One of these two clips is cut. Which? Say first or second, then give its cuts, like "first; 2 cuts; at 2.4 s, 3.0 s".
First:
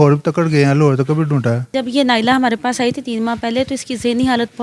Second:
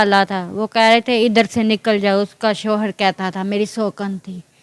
first; 1 cut; at 1.7 s